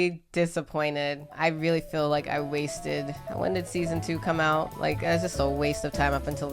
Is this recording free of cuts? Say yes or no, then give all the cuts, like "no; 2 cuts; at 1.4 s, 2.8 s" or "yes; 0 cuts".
yes; 0 cuts